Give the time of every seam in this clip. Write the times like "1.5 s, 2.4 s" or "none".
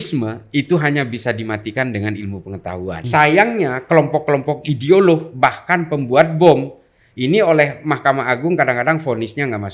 3.0 s